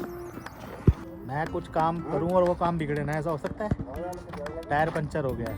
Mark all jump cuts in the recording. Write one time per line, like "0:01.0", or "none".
0:01.0